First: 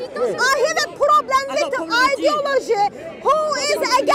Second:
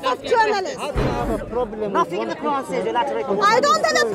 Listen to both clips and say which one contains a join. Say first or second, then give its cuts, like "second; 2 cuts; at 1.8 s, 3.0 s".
second; 1 cut; at 1.0 s